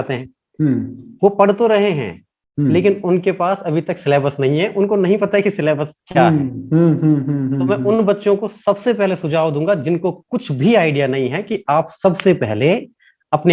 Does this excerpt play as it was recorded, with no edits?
yes; 0 cuts

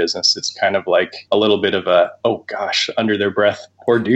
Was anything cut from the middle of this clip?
yes; 2 cuts; at 1.2 s, 2.1 s

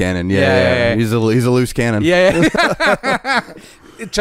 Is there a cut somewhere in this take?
yes; 1 cut; at 2.5 s

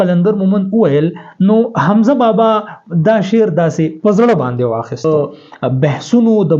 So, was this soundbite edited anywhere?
yes; 1 cut; at 5.0 s

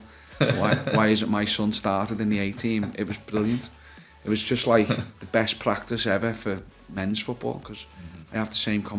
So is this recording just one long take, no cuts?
yes; 0 cuts

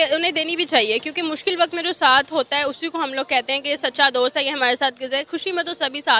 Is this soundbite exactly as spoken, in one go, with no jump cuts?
yes; 0 cuts

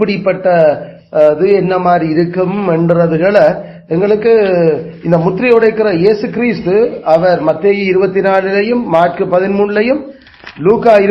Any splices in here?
no; 0 cuts

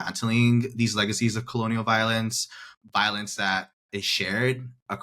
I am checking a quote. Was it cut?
yes; 1 cut; at 2.7 s

